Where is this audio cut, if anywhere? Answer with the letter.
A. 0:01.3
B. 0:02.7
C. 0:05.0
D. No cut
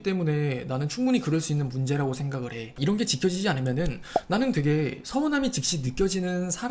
B